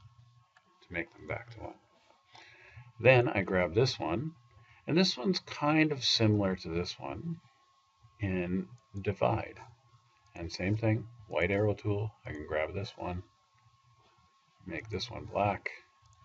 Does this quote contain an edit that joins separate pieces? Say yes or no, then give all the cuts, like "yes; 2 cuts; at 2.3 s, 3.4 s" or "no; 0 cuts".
no; 0 cuts